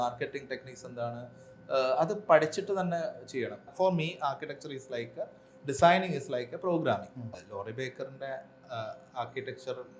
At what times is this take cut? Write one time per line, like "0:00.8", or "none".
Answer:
0:03.6
0:07.3